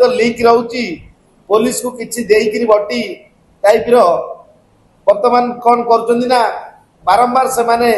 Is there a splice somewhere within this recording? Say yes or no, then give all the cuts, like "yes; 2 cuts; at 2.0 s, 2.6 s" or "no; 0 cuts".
no; 0 cuts